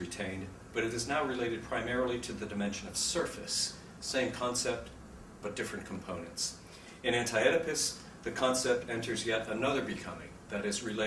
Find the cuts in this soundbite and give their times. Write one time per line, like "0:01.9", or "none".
0:04.8